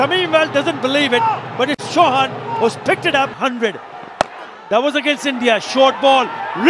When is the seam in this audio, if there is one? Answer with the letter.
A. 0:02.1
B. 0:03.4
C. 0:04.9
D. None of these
B